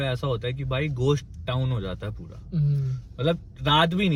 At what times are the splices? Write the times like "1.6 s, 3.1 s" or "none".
none